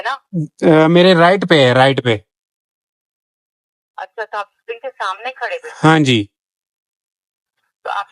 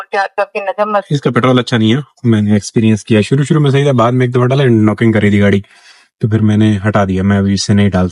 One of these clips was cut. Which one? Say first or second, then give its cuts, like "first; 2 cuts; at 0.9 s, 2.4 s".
second; 1 cut; at 1.1 s